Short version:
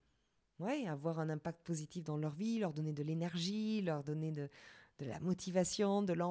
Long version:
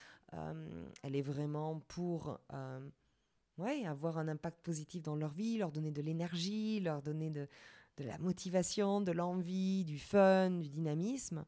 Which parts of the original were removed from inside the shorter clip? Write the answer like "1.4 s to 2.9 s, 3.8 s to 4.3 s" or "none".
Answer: none